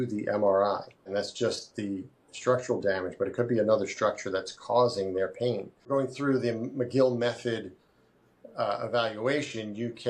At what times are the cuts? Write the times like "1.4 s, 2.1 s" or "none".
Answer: 1.1 s, 5.9 s